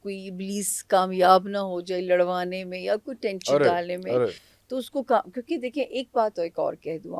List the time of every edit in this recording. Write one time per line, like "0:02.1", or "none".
none